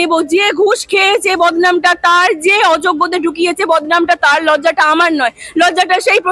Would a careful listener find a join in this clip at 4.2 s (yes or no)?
no